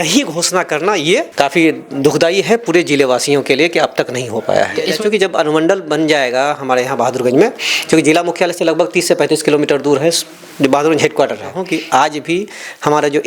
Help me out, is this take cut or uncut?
cut